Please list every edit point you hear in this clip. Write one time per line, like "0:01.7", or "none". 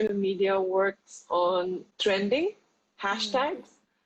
0:01.8